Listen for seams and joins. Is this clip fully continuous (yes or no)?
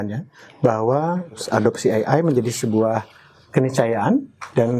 no